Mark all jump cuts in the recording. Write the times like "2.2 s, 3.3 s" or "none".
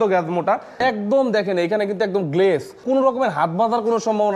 0.8 s, 2.8 s

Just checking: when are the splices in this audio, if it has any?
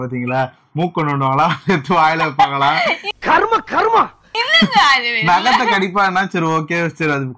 3.1 s

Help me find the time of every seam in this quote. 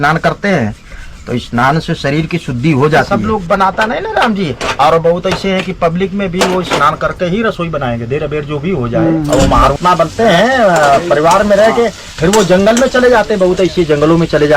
3.1 s, 9.3 s

